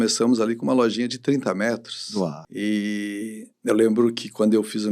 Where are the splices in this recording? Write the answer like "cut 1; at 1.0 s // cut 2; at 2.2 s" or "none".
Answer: cut 1; at 2.4 s // cut 2; at 3.4 s

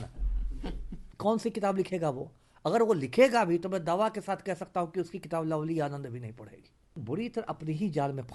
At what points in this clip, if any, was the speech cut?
cut 1; at 1.1 s // cut 2; at 7.0 s

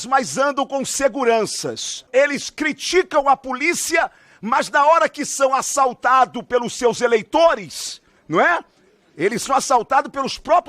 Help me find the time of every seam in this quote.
cut 1; at 2.1 s

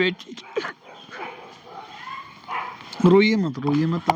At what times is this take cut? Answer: none

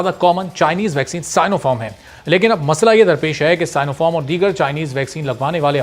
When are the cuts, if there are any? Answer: none

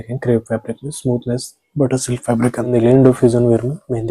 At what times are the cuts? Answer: cut 1; at 2.6 s

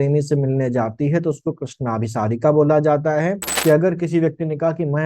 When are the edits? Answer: cut 1; at 3.5 s

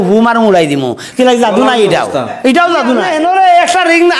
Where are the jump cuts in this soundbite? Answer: cut 1; at 3.1 s

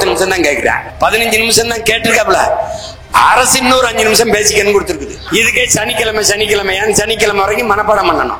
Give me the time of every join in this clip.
cut 1; at 0.9 s // cut 2; at 5.2 s

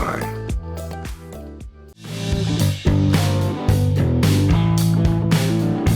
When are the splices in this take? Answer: cut 1; at 2.1 s

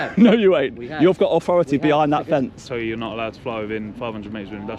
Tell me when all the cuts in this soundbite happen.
cut 1; at 2.6 s

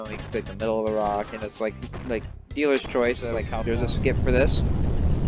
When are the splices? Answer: cut 1; at 3.5 s

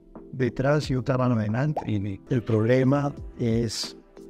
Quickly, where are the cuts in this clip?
cut 1; at 2.2 s

